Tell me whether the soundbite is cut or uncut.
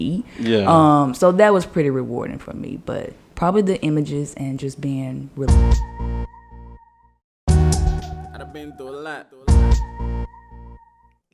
cut